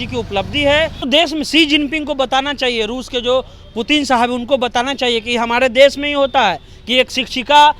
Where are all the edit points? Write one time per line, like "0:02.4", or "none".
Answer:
0:01.0